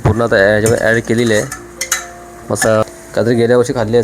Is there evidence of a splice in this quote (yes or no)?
yes